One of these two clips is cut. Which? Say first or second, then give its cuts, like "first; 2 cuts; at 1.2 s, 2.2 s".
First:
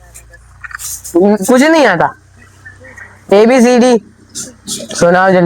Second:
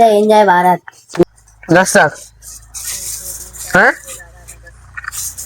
second; 1 cut; at 1.2 s